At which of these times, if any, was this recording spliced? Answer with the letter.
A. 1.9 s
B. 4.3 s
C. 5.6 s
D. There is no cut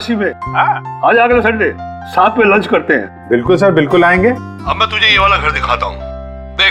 D